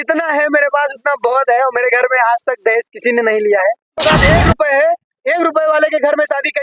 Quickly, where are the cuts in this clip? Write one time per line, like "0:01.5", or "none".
0:03.9